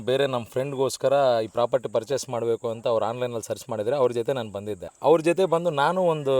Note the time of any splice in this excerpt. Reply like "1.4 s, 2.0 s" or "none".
4.9 s